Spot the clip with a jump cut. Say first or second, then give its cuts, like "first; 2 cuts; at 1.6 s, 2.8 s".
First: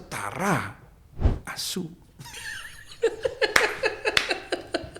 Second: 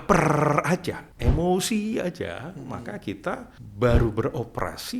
second; 2 cuts; at 1.1 s, 3.6 s